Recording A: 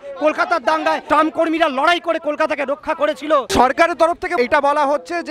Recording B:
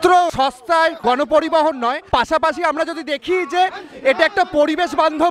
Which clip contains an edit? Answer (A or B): A